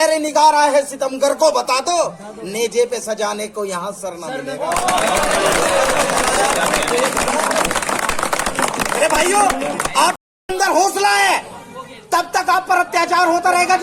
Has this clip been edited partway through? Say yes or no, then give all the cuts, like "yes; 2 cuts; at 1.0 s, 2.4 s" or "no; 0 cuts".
yes; 1 cut; at 10.3 s